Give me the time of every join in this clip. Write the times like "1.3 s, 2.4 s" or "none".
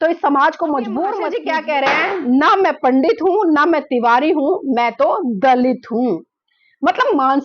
1.3 s